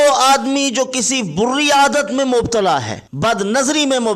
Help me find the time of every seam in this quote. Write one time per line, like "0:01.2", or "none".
0:03.0